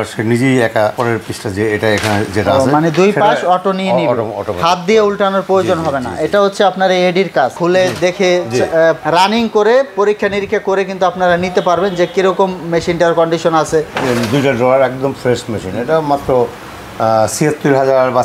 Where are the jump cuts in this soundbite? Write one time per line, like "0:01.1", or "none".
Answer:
0:07.6
0:13.9